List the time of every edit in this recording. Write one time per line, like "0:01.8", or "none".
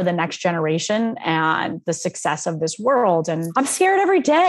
0:03.5